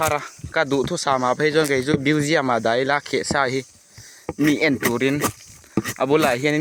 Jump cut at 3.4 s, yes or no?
no